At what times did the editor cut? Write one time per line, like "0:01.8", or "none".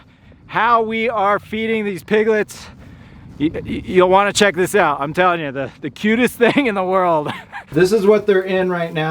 0:07.7